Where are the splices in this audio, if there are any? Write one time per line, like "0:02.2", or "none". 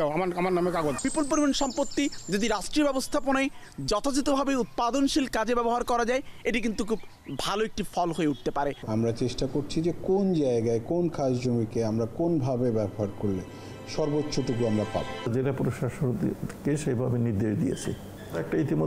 0:01.0
0:08.8
0:15.3